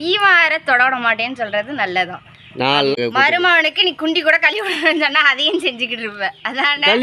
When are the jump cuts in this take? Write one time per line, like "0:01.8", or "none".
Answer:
0:03.0